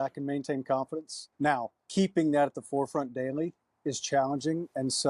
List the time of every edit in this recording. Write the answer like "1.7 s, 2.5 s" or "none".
1.8 s